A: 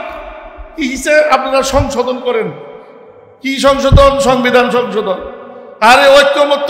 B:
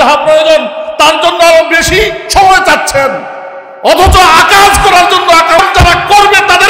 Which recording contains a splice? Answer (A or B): B